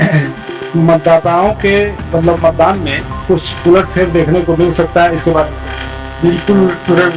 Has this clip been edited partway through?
no; 0 cuts

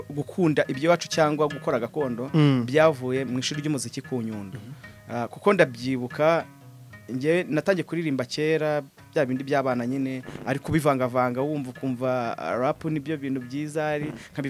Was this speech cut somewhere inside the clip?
no; 0 cuts

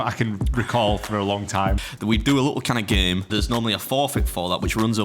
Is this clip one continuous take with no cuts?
no; 2 cuts; at 1.8 s, 3.3 s

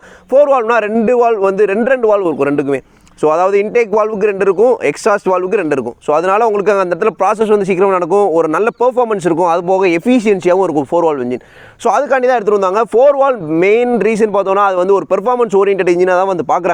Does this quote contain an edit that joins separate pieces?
no; 0 cuts

